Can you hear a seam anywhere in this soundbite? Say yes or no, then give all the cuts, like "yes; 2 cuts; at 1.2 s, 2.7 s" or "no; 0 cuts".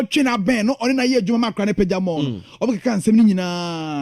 no; 0 cuts